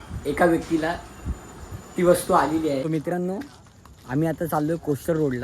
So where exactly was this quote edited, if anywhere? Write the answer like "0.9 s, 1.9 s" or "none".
2.8 s